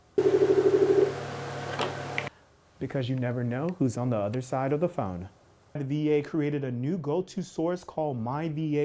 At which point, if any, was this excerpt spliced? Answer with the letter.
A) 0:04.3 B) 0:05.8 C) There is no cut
B